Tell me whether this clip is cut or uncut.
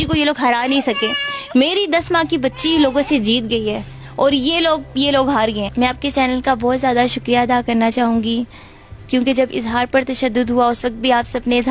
cut